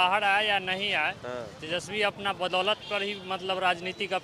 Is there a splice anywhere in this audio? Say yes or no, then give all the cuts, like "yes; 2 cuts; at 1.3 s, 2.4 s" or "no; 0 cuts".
no; 0 cuts